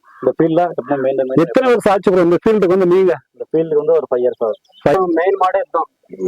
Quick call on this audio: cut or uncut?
cut